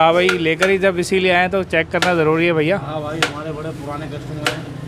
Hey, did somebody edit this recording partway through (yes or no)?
no